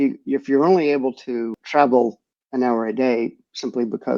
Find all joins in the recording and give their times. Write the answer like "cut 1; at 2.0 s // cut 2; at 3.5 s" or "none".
cut 1; at 1.5 s